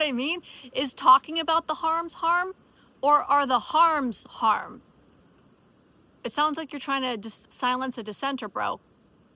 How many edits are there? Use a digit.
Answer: 1